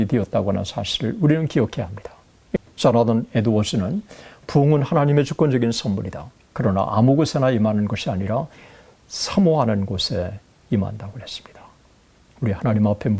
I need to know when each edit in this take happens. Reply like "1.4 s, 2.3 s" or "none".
2.6 s